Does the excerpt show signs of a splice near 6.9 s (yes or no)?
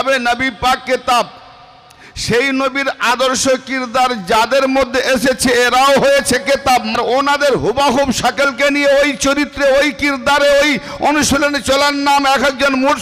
yes